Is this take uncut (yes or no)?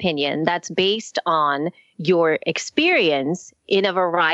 yes